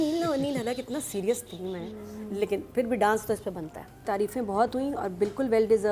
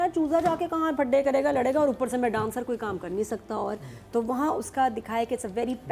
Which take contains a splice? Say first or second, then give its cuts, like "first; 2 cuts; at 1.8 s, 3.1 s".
first; 1 cut; at 4.0 s